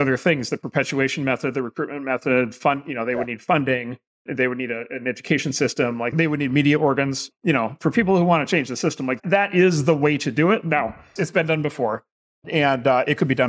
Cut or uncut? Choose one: cut